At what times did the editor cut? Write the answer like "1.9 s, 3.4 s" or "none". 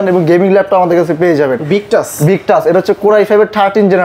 none